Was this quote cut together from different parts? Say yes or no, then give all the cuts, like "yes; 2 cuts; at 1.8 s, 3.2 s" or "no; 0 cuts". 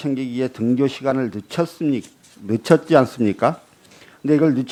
no; 0 cuts